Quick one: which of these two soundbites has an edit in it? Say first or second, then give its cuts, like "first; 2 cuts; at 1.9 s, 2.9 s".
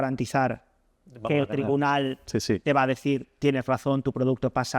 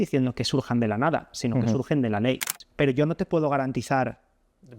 second; 1 cut; at 2.6 s